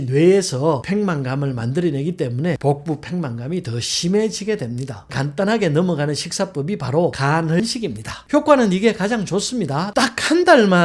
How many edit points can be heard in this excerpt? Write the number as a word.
two